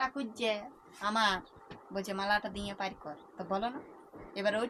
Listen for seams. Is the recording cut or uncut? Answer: uncut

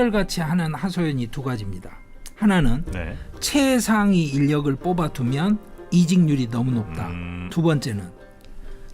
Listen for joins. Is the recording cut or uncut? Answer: cut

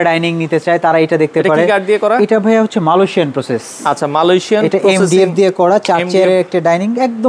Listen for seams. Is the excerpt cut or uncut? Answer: uncut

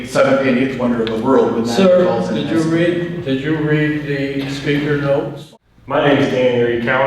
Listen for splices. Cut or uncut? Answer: cut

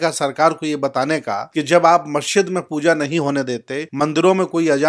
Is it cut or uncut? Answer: cut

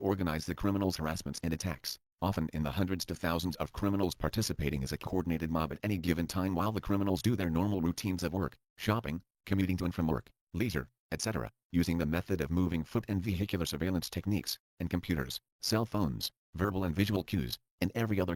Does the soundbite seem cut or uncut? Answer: uncut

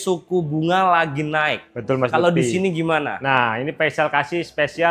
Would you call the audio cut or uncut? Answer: uncut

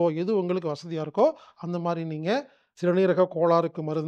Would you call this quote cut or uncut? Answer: cut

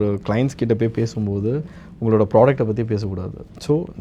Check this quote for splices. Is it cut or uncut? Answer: uncut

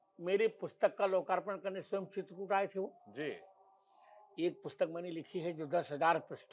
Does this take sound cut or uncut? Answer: uncut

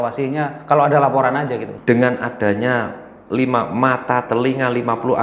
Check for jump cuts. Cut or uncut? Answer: cut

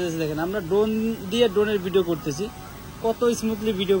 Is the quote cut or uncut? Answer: uncut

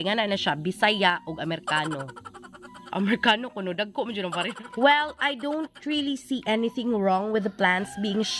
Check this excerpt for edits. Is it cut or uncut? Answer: cut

